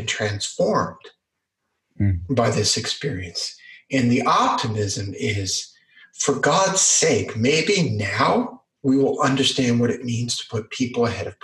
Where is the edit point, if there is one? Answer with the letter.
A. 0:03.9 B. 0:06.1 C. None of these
C